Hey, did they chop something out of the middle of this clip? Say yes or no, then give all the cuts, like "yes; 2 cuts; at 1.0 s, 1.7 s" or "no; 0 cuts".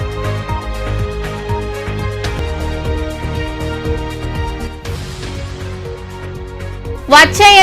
yes; 1 cut; at 2.3 s